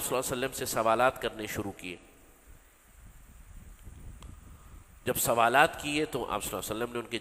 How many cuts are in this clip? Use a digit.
0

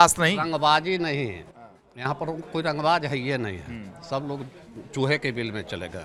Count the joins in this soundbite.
0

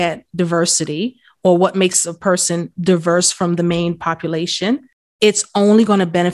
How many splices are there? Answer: 1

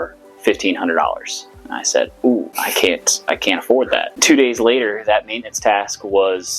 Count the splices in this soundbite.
2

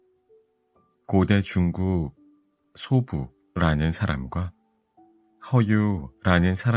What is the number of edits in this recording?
1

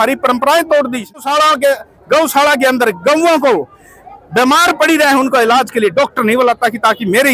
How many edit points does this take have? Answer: 1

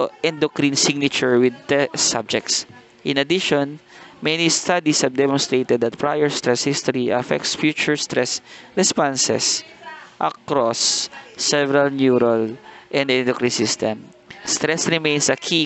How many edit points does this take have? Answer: 1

